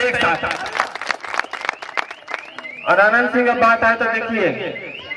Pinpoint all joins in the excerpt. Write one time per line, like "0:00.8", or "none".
none